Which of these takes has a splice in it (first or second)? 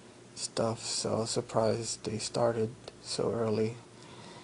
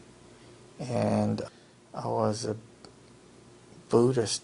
first